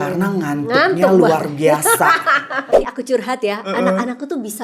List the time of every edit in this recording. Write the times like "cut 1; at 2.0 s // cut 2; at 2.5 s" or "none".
cut 1; at 2.6 s